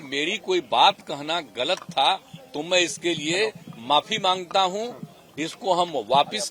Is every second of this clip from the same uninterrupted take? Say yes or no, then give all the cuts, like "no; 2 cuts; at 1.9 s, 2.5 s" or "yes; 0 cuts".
yes; 0 cuts